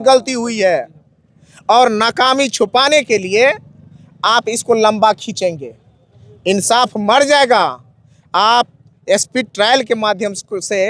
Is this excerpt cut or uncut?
uncut